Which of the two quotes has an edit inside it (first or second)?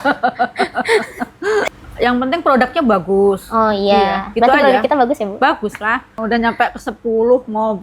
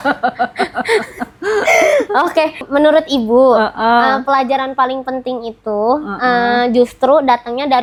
first